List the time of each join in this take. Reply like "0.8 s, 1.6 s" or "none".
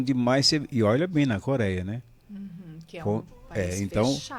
none